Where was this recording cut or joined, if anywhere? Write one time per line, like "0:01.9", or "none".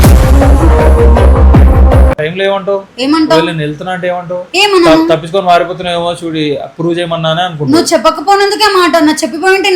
0:02.2